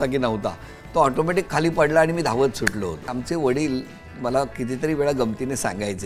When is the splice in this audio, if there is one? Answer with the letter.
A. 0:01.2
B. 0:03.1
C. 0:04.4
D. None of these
B